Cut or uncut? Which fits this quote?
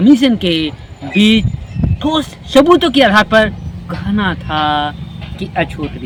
uncut